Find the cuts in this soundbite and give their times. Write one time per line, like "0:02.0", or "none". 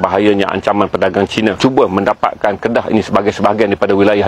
0:01.6